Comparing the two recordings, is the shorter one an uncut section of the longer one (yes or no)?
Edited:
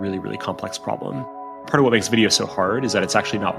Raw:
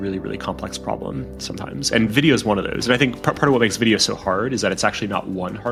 no